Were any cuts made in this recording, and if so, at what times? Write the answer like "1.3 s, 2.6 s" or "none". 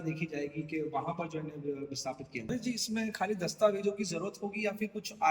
2.5 s